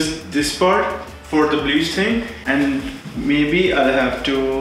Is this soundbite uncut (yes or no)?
yes